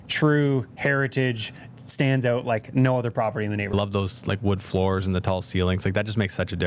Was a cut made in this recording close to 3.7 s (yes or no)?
yes